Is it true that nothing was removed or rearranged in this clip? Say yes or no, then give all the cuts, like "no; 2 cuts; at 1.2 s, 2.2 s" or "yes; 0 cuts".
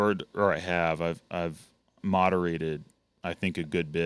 yes; 0 cuts